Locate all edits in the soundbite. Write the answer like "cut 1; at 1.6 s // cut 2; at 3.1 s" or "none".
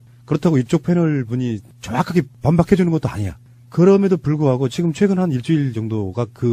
cut 1; at 2.3 s